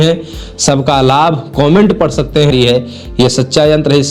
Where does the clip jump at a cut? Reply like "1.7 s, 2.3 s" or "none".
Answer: 2.5 s